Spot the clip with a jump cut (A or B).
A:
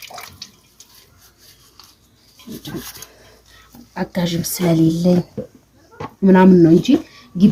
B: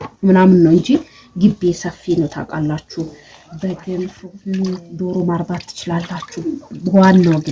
B